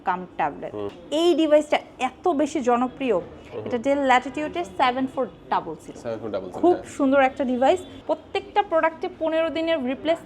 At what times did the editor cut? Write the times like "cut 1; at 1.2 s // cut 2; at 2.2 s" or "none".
cut 1; at 0.9 s // cut 2; at 7.9 s